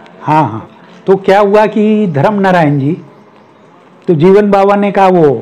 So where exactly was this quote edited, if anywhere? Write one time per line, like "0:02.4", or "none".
none